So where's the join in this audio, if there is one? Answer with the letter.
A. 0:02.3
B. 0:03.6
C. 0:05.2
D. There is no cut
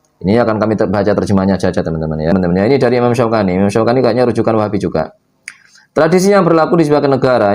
A